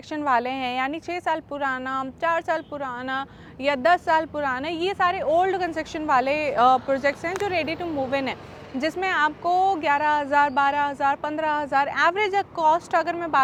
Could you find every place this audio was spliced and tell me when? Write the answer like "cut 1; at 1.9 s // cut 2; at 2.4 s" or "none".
none